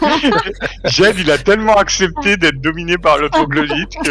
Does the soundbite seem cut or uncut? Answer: uncut